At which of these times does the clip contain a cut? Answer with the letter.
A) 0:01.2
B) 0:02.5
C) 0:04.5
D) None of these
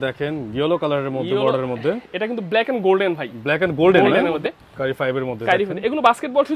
C